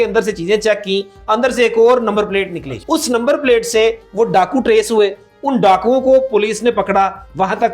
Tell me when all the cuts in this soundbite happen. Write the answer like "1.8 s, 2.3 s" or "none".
2.7 s